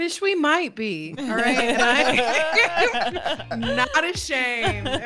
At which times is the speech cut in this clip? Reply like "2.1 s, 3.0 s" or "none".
none